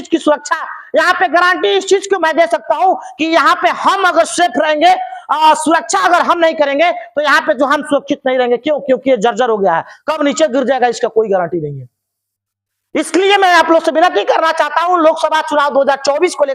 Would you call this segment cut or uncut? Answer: uncut